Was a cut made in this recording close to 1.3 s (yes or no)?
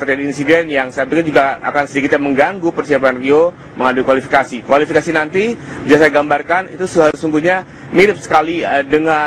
yes